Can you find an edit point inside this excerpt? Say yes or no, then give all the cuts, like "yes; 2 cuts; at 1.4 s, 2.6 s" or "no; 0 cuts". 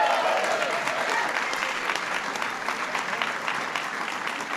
no; 0 cuts